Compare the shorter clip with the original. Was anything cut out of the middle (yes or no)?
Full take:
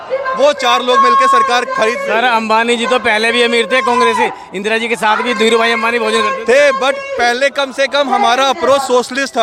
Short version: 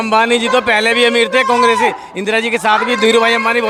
no